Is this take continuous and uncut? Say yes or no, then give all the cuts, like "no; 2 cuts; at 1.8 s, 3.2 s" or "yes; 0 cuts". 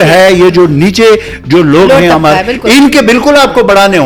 yes; 0 cuts